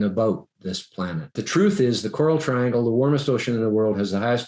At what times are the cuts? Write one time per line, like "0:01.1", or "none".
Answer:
0:01.4

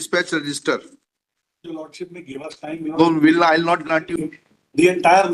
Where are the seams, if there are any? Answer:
0:04.1

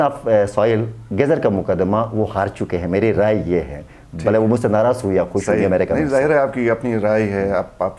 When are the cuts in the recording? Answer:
none

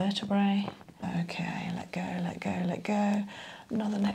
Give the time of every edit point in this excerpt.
0:01.0

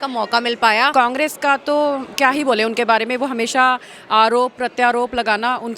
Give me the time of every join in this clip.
0:00.9

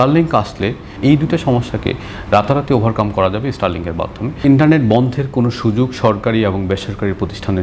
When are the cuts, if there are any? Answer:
0:01.0
0:04.3

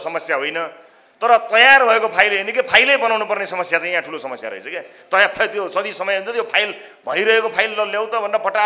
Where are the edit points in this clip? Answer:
none

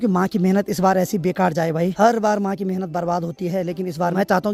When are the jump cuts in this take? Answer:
none

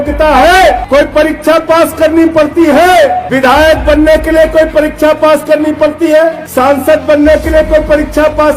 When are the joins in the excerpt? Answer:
0:00.8
0:03.2
0:06.4

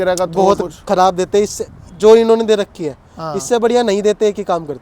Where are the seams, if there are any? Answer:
none

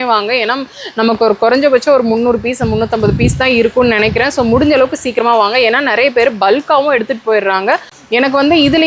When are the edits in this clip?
0:07.9

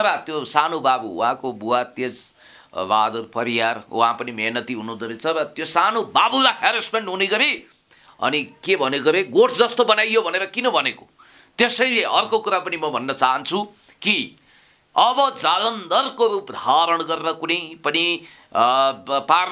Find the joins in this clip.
none

